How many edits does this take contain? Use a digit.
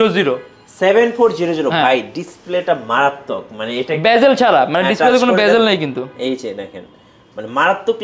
0